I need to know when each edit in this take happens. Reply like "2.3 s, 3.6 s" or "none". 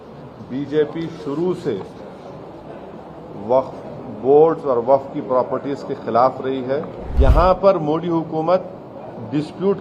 7.0 s